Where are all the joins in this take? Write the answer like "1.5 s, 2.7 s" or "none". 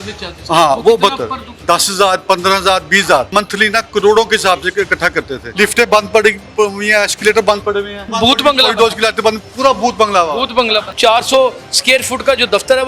1.6 s, 3.3 s, 5.4 s, 8.1 s, 10.9 s